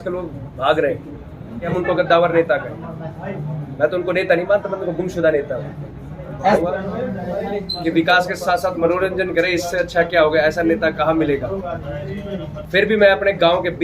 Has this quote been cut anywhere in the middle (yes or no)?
yes